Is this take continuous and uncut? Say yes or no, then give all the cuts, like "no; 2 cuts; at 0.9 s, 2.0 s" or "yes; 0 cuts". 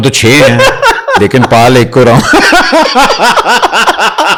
yes; 0 cuts